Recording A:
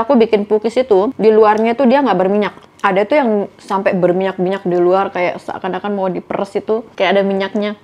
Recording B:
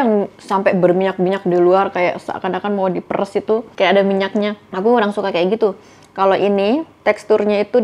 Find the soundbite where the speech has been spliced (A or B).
A